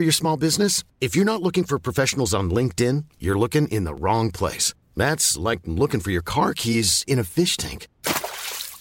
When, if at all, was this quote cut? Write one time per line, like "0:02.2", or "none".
none